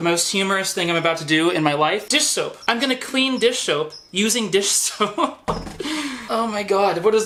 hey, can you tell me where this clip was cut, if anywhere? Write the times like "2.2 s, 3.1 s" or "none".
none